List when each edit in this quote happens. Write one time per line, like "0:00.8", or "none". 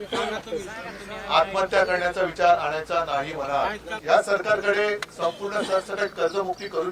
0:04.0